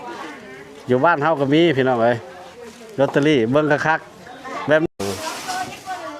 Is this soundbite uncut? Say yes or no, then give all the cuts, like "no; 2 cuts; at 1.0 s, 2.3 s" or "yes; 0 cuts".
no; 1 cut; at 4.9 s